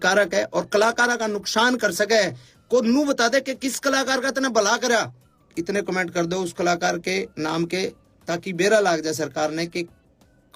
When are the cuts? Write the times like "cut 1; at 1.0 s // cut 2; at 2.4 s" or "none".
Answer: cut 1; at 5.4 s